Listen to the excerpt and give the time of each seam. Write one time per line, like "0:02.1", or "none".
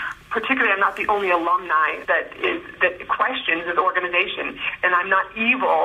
0:02.0